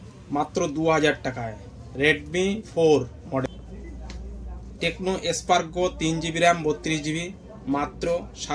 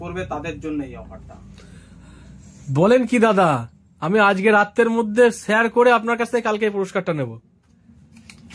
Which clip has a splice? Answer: first; 1 cut; at 3.6 s

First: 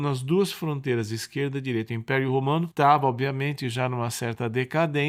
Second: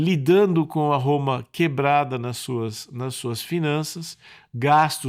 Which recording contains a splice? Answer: first; 1 cut; at 2.7 s

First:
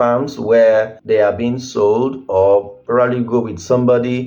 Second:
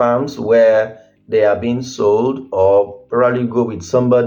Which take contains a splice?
first; 1 cut; at 1.0 s

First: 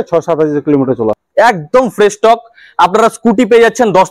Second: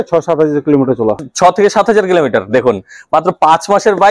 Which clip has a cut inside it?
first; 1 cut; at 1.2 s

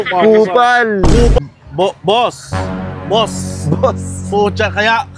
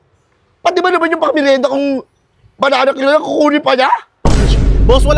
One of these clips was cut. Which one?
first; 1 cut; at 1.4 s

